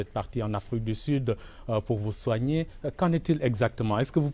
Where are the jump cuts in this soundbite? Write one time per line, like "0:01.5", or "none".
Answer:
none